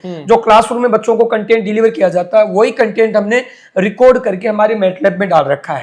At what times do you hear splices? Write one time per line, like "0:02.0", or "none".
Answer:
none